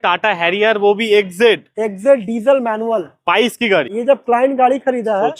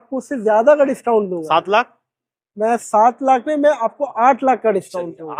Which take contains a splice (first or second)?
first